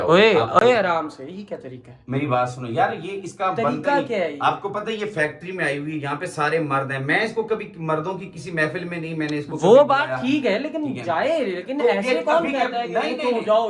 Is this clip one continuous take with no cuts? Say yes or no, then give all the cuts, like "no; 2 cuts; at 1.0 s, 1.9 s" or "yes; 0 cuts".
yes; 0 cuts